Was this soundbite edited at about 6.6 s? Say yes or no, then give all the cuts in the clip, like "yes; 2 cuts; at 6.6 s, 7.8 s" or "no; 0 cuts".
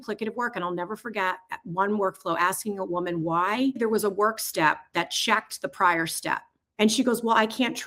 yes; 2 cuts; at 3.8 s, 6.6 s